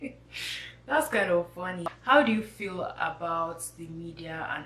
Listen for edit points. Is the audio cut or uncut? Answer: cut